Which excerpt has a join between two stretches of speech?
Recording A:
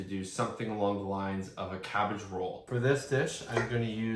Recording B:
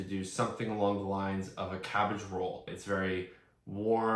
A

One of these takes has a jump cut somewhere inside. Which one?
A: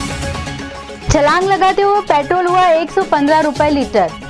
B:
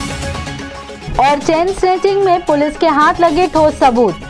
A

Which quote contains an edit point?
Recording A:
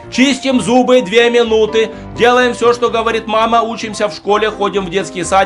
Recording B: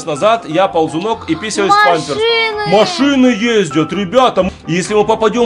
B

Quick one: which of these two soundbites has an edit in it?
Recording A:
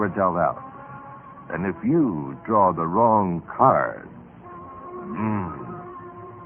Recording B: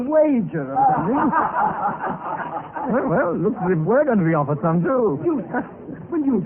A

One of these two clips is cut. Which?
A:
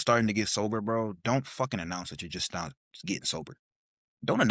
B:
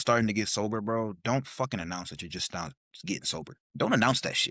B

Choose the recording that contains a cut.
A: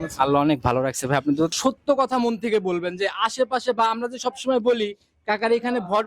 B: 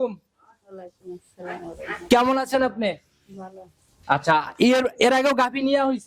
A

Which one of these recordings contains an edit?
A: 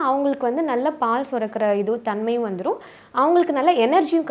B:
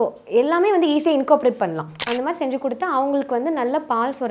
B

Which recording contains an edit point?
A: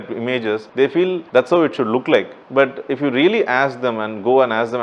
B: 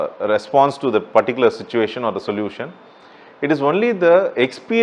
A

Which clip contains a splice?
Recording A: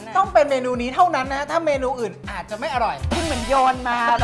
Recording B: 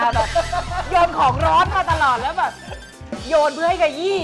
A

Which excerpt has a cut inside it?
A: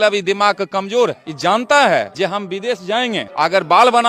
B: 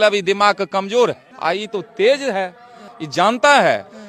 A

